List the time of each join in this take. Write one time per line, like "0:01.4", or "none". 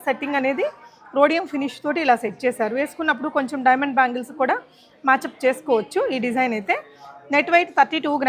none